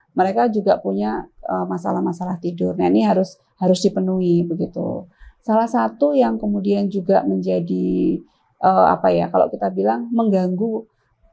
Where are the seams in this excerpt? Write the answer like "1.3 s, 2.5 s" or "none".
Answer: none